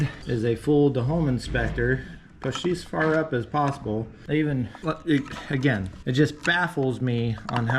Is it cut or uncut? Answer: cut